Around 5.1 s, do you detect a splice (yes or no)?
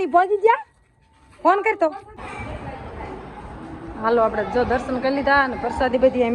no